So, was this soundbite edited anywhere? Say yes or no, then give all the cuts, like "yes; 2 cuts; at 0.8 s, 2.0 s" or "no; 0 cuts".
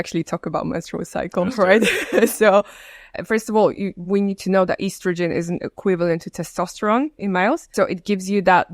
yes; 2 cuts; at 3.1 s, 7.7 s